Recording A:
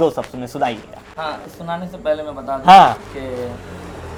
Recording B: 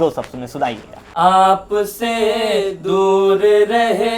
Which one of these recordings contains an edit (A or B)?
B